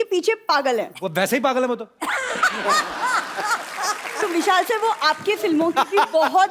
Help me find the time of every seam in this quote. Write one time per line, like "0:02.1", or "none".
0:00.9
0:04.2